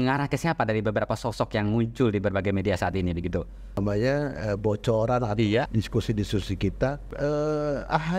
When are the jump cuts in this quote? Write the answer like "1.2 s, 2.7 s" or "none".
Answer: 3.8 s, 5.7 s, 7.1 s